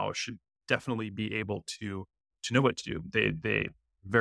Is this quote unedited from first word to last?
yes; 0 cuts

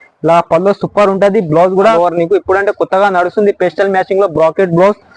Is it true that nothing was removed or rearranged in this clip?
no; 1 cut; at 1.9 s

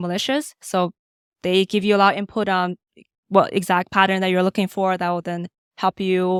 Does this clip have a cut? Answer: no; 0 cuts

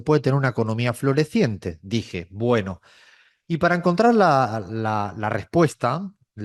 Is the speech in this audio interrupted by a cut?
no; 0 cuts

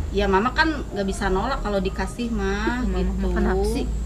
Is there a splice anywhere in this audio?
no; 0 cuts

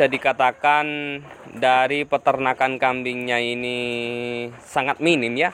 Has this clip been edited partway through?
yes; 1 cut; at 4.6 s

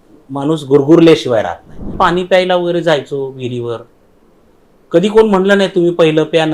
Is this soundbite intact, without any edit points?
no; 1 cut; at 1.9 s

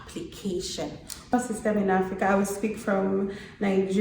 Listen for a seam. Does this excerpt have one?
yes; 1 cut; at 1.3 s

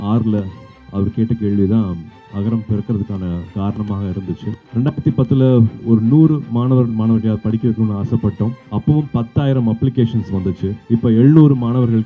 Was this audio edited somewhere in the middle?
yes; 3 cuts; at 3.5 s, 4.6 s, 5.8 s

